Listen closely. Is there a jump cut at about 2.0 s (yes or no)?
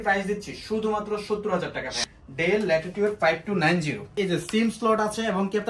yes